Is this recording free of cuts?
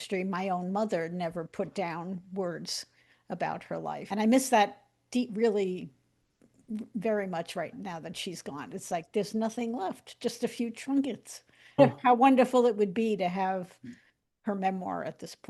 no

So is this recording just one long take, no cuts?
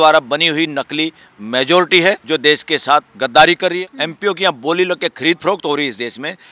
no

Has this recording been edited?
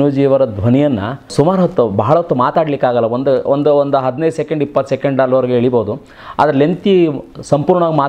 yes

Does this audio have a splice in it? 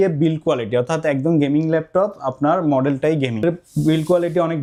no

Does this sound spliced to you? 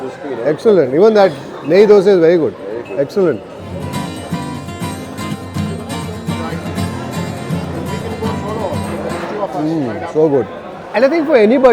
yes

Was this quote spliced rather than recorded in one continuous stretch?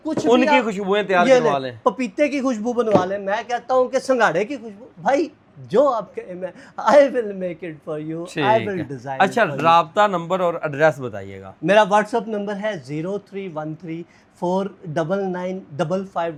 no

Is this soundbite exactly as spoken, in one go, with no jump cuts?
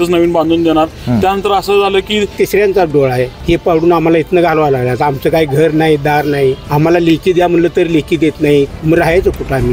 no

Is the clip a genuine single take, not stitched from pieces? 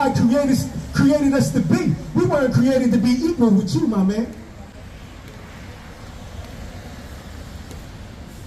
yes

